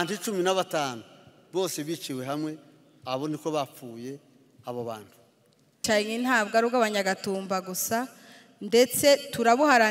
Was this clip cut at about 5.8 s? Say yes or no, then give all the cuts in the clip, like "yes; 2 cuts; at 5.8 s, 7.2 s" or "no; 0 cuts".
yes; 1 cut; at 5.8 s